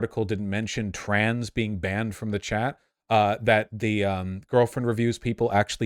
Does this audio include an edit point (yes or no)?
no